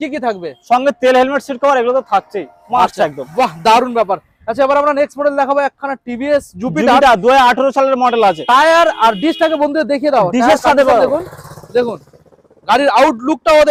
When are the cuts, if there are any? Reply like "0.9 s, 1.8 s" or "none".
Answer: none